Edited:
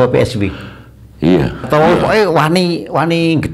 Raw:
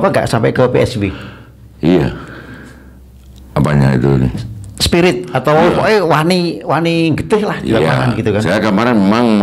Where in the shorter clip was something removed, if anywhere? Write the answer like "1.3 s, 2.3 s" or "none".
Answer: 1.7 s